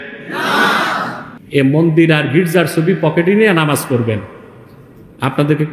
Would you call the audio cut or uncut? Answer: cut